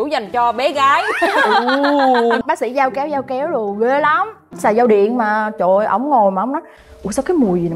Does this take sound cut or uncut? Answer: cut